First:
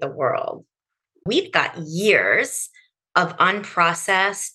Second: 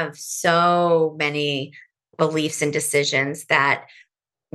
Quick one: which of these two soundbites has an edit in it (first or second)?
first